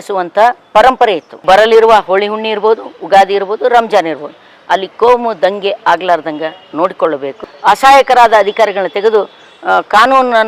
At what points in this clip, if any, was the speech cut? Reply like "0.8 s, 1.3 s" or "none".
1.3 s, 7.4 s